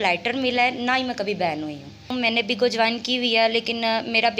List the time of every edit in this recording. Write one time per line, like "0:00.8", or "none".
0:02.1

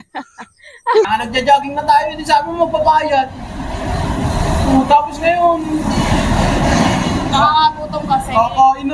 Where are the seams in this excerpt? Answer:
0:01.1

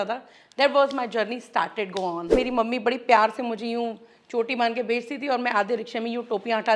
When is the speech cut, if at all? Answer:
0:02.3

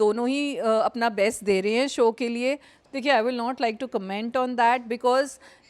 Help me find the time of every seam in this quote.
0:02.7

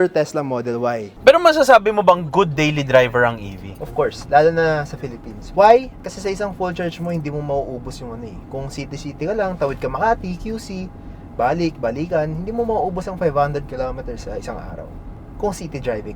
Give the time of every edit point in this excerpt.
0:01.1

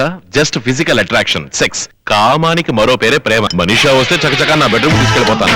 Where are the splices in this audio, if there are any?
0:01.9
0:03.5

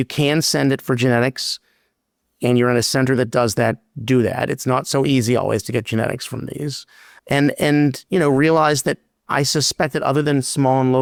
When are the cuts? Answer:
none

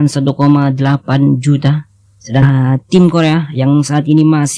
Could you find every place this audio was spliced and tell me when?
0:02.4

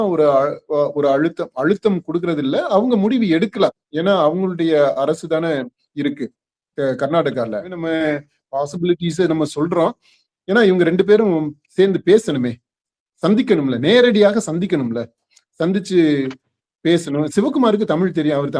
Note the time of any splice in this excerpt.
0:07.8

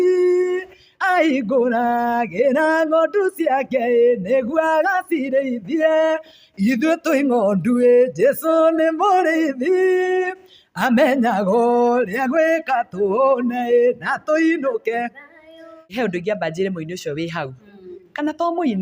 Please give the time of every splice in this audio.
0:15.9

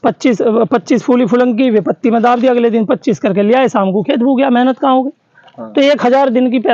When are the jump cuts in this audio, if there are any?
0:05.5

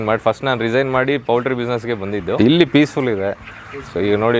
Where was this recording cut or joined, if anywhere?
0:02.4

